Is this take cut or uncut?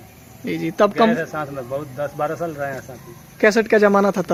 uncut